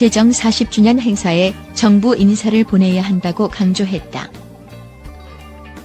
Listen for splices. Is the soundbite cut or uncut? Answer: cut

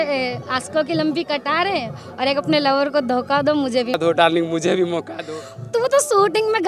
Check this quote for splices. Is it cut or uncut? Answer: cut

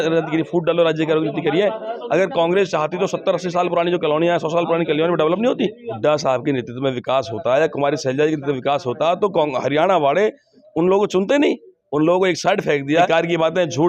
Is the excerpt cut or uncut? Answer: cut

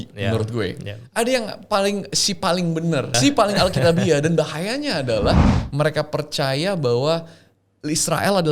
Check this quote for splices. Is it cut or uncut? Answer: cut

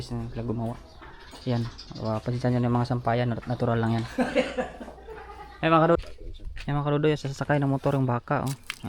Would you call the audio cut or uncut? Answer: cut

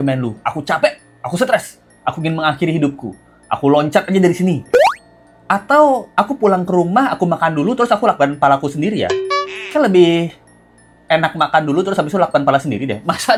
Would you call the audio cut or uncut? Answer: uncut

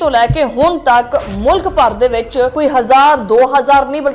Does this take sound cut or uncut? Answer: cut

